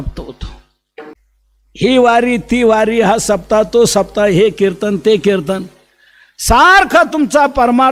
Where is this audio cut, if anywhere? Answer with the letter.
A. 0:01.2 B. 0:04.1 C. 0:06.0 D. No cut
A